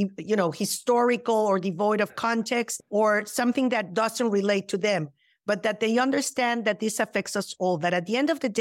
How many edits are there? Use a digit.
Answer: 1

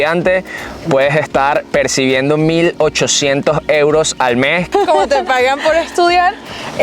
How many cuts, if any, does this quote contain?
1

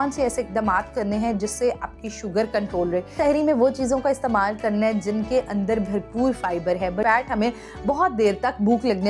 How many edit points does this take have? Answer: 2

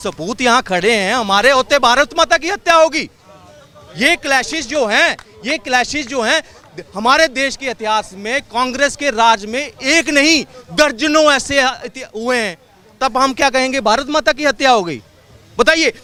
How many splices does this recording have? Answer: 0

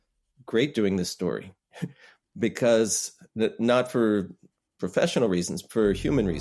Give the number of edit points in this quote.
0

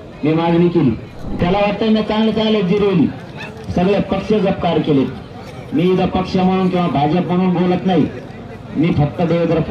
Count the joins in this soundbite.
1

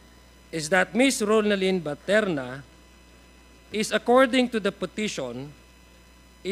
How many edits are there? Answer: 1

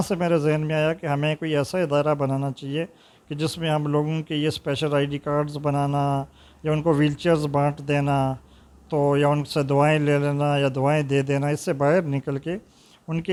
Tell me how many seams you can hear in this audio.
0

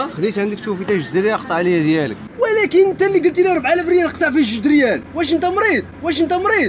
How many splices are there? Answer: 1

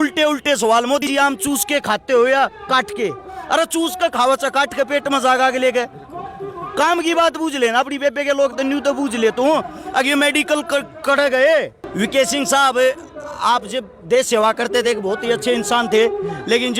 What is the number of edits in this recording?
2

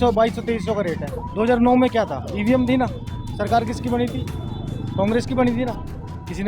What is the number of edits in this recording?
1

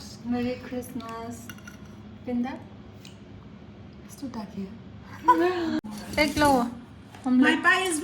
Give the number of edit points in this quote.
1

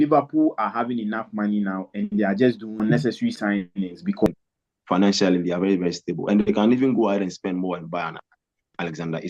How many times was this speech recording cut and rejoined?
2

